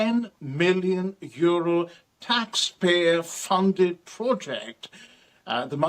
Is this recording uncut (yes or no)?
yes